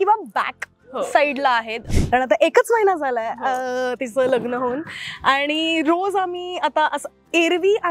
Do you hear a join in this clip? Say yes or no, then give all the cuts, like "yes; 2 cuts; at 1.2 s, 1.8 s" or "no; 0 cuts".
yes; 1 cut; at 1.8 s